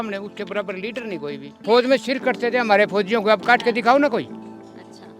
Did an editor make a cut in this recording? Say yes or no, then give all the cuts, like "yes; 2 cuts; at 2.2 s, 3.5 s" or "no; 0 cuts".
no; 0 cuts